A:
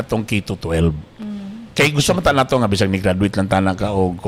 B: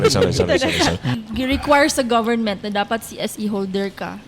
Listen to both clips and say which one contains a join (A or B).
B